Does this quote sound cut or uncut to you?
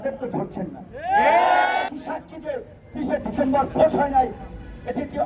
cut